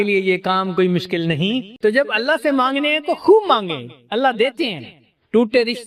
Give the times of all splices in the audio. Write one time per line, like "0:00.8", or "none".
0:01.7